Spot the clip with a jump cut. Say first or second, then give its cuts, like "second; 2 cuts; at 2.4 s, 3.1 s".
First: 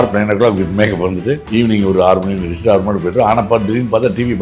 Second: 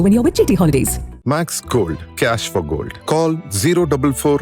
first; 1 cut; at 1.4 s